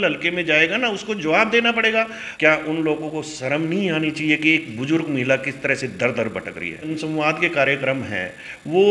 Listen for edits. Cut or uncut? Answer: cut